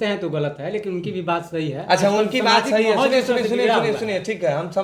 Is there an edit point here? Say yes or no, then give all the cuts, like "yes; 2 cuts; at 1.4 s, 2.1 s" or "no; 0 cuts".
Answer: no; 0 cuts